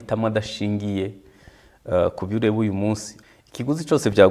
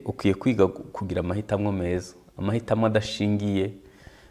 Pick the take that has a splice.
first; 1 cut; at 3.1 s

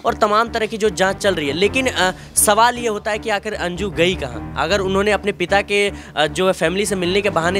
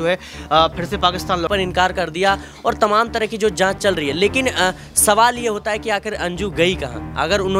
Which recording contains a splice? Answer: second; 1 cut; at 1.5 s

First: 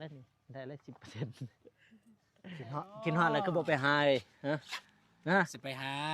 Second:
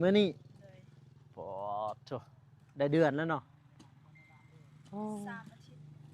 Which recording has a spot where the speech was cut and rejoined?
first; 1 cut; at 2.7 s

